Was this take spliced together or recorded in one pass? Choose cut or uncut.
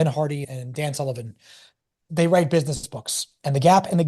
cut